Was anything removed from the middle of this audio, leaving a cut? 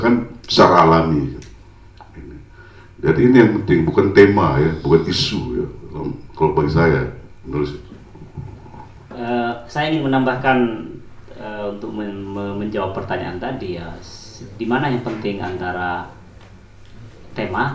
no; 0 cuts

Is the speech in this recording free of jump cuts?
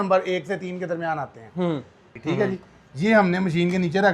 no; 1 cut; at 2.1 s

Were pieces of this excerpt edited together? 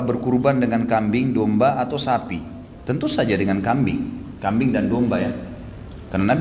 no; 0 cuts

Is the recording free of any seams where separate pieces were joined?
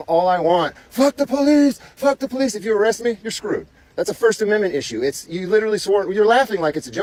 yes; 0 cuts

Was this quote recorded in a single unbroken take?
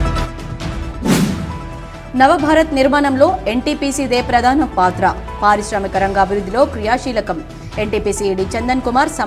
yes; 0 cuts

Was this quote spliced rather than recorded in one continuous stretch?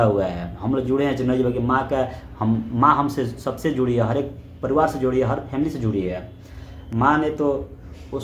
no; 0 cuts

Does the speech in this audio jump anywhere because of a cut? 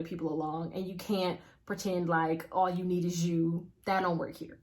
yes; 1 cut; at 3.7 s

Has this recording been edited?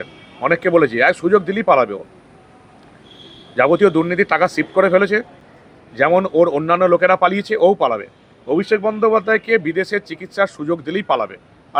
no; 0 cuts

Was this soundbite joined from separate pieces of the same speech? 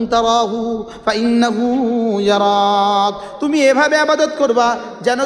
no; 0 cuts

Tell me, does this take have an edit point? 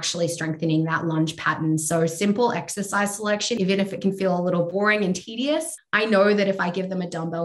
yes; 3 cuts; at 3.6 s, 4.7 s, 5.8 s

